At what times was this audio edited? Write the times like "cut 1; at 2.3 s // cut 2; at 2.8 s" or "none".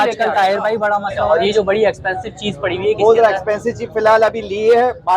cut 1; at 1.3 s